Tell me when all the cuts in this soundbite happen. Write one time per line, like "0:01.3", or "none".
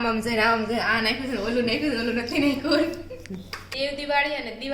0:03.6